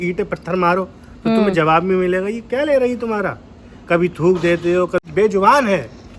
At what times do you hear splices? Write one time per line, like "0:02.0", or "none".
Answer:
0:05.0